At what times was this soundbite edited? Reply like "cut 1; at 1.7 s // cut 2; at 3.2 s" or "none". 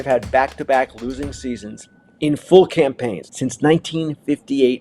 cut 1; at 3.2 s